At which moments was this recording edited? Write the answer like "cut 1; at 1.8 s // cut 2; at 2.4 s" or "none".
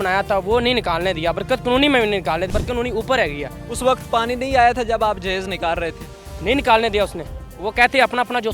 cut 1; at 2.5 s